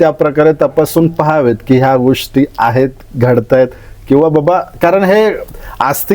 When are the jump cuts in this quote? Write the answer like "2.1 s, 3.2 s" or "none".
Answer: none